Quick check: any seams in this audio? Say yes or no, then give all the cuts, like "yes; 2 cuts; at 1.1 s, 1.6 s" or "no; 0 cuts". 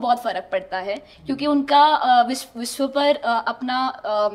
no; 0 cuts